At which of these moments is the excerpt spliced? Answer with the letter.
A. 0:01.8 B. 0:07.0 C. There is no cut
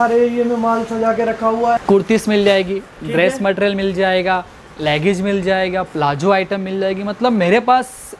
A